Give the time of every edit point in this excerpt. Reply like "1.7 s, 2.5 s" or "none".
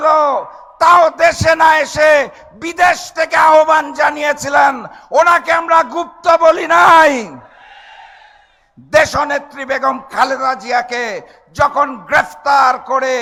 none